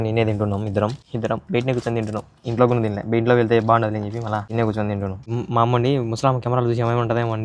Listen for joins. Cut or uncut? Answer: cut